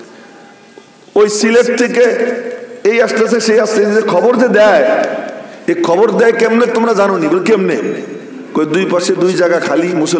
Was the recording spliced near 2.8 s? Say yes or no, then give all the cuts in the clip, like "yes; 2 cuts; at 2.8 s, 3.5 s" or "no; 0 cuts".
no; 0 cuts